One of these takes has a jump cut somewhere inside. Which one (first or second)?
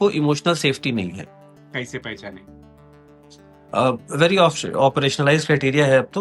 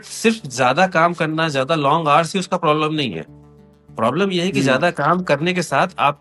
first